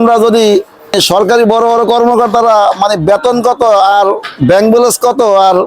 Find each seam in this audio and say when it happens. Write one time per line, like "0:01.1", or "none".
0:00.9